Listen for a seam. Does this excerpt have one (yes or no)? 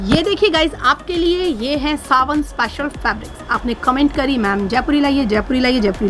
no